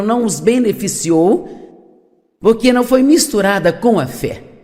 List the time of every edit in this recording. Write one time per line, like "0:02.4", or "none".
0:03.7